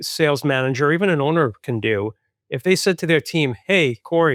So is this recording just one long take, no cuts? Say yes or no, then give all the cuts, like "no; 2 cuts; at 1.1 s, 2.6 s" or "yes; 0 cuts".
yes; 0 cuts